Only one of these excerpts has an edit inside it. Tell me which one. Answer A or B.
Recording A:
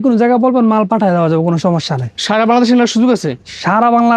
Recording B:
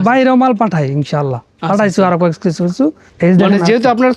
B